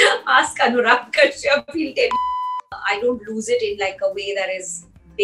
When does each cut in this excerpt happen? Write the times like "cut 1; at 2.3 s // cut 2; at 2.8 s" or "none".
cut 1; at 2.3 s